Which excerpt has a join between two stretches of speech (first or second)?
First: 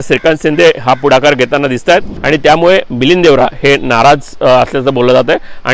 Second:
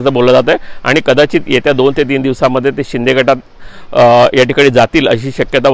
first